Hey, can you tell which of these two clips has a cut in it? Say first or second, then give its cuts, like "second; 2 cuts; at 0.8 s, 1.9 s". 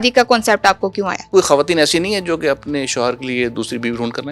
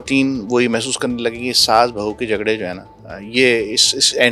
first; 1 cut; at 1.3 s